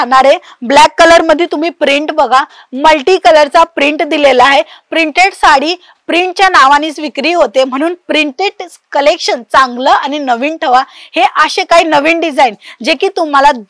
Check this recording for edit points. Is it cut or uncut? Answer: uncut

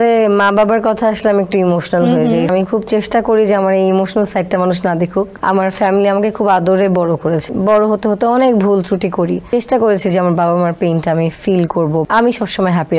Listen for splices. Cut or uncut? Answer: cut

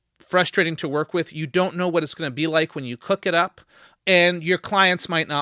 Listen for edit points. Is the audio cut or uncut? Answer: uncut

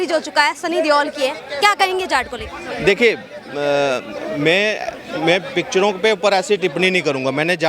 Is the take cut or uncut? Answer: uncut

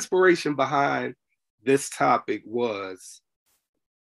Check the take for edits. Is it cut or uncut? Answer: uncut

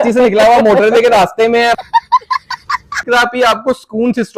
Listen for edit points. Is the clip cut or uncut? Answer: cut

